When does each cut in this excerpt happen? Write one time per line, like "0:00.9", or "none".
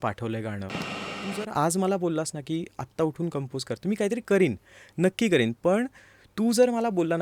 0:01.2